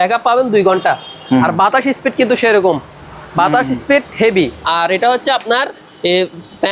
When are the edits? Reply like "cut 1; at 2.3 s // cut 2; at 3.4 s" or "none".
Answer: none